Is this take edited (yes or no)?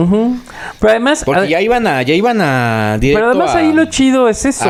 no